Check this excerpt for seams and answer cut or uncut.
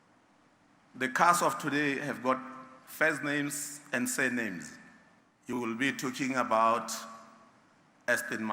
cut